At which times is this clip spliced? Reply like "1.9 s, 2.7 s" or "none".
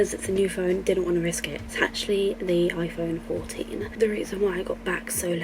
none